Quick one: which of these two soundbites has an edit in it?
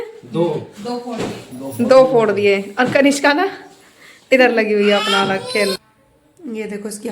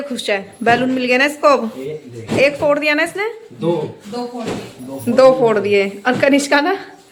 first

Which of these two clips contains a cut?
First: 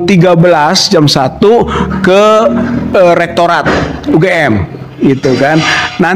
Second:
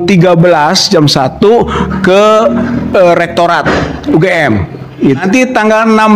second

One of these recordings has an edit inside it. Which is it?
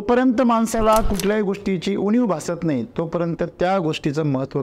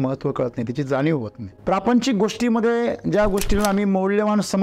second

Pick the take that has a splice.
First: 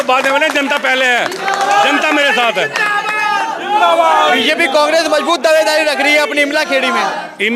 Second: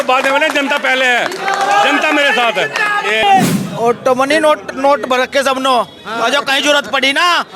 second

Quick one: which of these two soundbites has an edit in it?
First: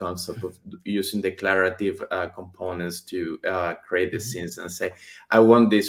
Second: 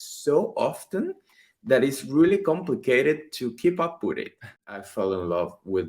second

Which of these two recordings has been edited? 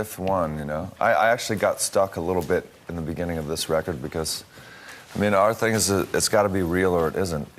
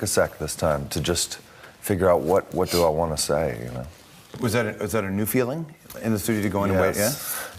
second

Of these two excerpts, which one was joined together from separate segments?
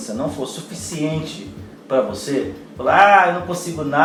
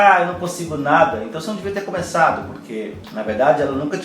second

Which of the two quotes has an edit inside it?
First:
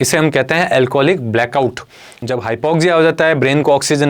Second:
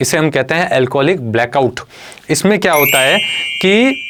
first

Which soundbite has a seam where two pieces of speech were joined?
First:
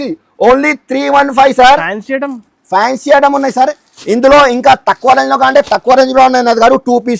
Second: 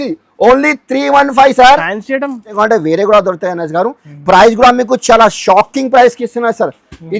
second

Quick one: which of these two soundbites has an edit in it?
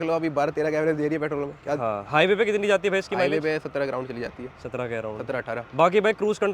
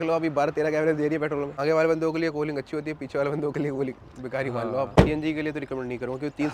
second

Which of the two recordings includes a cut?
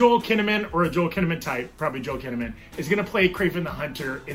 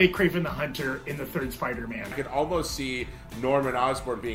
second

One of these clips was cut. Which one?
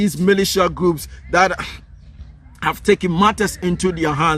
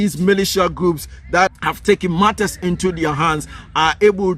second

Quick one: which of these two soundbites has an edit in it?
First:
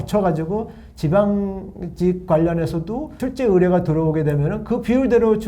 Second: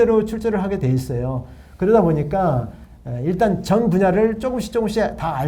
first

